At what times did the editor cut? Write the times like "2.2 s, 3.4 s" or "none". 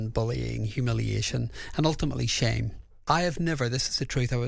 2.9 s